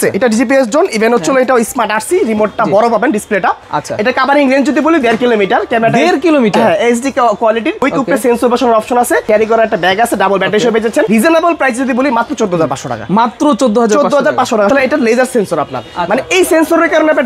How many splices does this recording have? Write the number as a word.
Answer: four